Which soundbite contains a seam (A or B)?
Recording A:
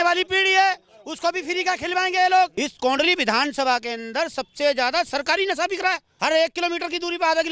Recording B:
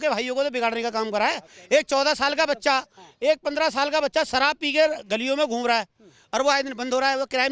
A